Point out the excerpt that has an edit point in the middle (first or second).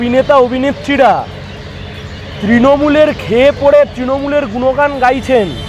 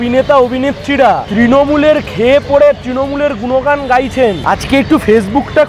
second